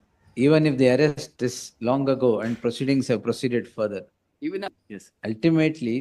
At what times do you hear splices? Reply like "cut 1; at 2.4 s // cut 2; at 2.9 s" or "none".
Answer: cut 1; at 4.8 s